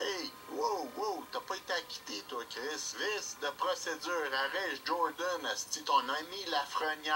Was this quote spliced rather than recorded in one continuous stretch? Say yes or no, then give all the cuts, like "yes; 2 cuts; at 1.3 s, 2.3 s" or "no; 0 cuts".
no; 0 cuts